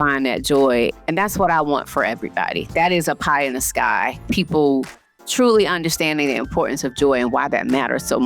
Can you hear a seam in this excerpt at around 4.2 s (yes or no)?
yes